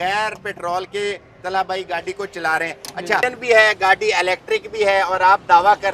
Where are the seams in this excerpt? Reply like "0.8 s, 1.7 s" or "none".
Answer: 3.2 s